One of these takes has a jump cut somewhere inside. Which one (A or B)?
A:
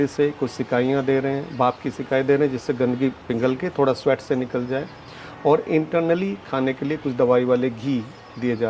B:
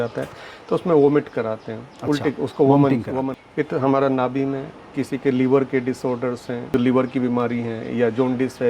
B